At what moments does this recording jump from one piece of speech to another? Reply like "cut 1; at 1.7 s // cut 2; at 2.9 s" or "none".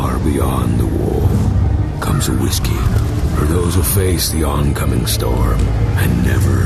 none